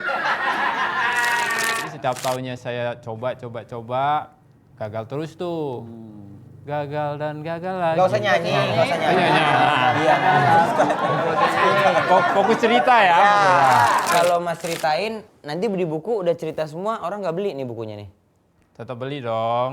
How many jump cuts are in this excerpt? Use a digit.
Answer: 2